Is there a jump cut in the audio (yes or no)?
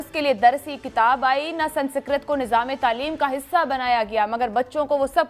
no